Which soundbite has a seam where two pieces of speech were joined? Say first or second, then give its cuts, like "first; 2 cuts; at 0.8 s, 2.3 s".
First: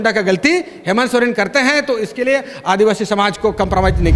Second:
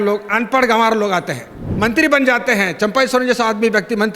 second; 1 cut; at 1.6 s